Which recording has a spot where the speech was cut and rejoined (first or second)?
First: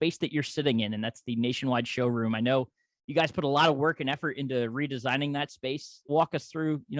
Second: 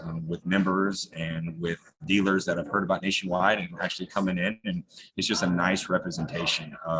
first